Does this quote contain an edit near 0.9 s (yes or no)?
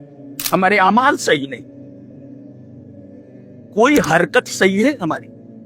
no